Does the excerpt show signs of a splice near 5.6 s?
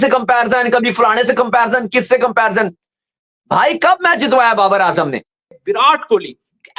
yes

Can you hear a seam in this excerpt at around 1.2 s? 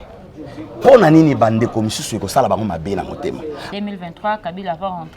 no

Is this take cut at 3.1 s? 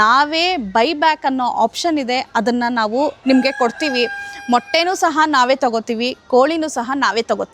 no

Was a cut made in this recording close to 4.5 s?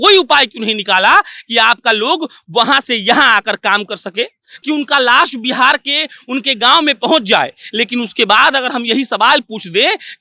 yes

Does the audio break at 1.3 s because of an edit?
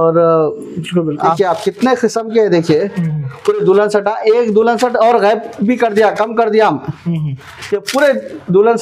yes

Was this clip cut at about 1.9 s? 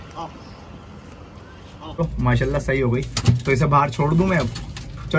yes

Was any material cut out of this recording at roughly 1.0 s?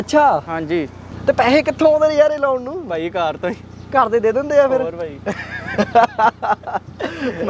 yes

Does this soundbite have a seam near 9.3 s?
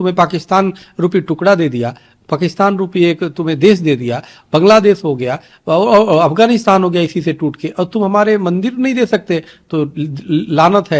no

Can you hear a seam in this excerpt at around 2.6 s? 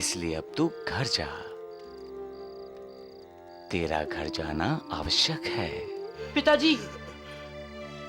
no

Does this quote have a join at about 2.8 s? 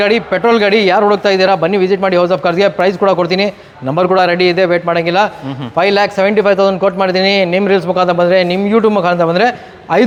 no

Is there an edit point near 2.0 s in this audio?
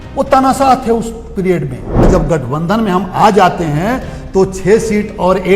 yes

